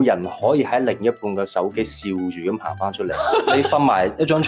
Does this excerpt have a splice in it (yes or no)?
yes